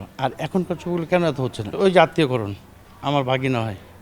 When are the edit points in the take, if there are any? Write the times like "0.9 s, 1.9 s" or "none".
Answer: 1.7 s